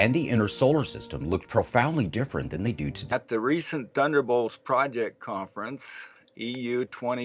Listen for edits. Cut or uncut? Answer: uncut